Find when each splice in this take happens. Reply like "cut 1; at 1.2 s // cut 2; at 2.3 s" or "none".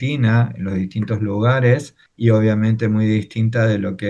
none